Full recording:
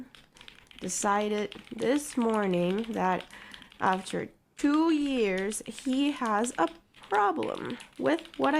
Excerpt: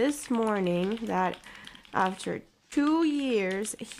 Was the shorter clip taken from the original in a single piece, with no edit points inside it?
yes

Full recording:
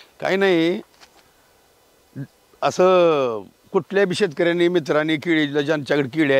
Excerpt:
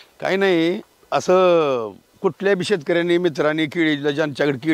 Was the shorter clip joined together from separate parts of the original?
yes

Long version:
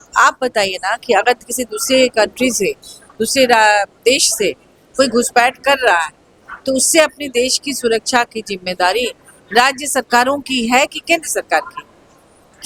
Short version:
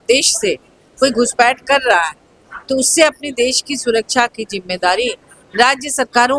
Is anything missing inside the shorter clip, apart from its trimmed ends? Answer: no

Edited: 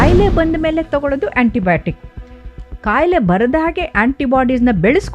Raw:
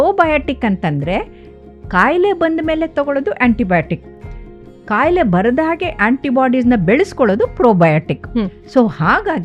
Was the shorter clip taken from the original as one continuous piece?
yes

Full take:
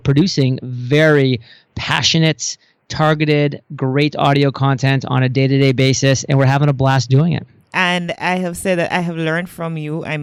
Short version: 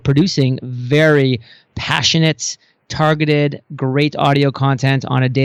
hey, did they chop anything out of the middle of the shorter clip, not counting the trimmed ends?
no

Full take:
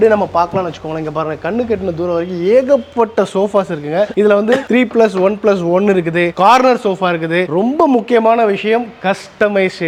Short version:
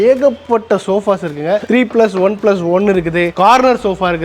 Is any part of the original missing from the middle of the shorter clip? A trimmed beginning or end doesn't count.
yes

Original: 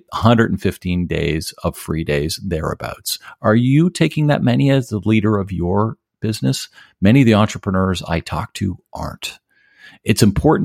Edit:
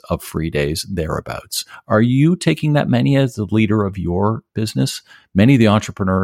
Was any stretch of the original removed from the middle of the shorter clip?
yes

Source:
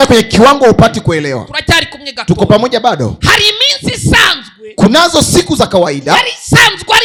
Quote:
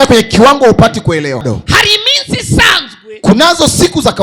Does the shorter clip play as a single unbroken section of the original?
no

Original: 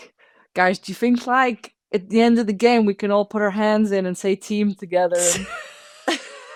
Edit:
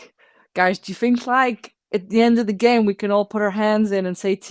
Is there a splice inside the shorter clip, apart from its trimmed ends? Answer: no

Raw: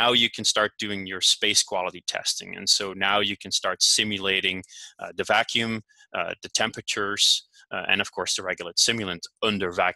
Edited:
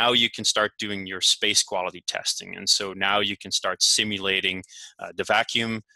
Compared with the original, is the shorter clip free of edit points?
yes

